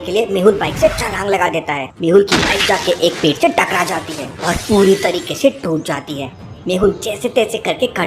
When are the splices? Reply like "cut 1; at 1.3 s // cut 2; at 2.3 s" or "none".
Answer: none